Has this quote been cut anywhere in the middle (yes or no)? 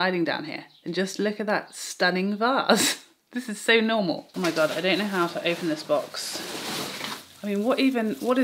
yes